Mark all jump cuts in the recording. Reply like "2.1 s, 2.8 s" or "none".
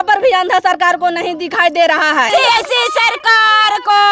2.3 s